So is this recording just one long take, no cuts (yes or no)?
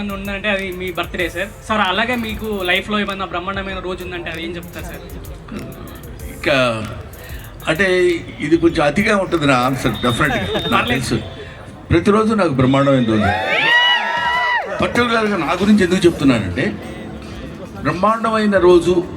yes